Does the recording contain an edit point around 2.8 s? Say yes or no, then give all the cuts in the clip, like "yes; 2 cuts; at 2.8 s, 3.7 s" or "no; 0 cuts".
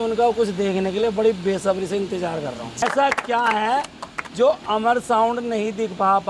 yes; 1 cut; at 2.8 s